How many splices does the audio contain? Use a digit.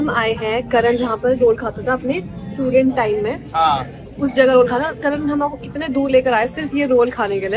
0